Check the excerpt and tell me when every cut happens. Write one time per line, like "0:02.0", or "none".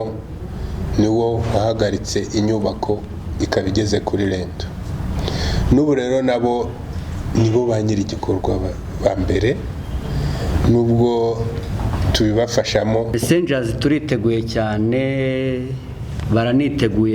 0:13.1